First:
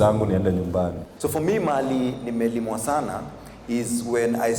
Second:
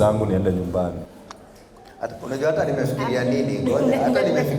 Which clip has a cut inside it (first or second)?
first